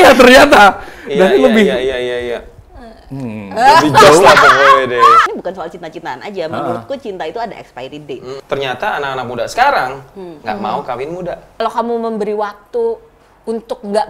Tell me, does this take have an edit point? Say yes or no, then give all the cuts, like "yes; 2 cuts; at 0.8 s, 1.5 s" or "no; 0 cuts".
yes; 3 cuts; at 5.2 s, 8.4 s, 11.6 s